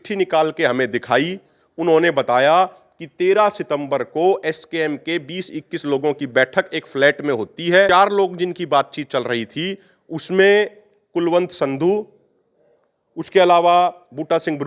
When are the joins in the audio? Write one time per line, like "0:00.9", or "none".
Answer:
0:07.9